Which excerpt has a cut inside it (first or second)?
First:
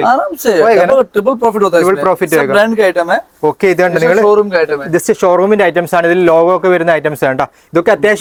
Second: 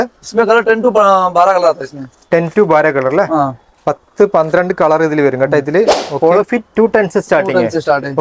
second